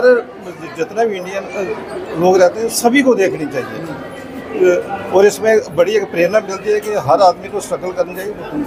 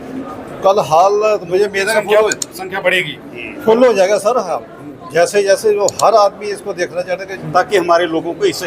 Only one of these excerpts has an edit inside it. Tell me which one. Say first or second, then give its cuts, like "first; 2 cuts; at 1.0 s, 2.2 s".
second; 1 cut; at 7.4 s